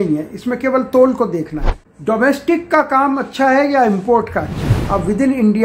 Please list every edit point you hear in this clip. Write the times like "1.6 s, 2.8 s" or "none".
1.9 s, 4.7 s